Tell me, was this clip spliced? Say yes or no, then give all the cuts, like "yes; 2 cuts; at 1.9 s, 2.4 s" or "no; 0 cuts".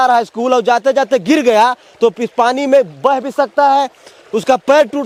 no; 0 cuts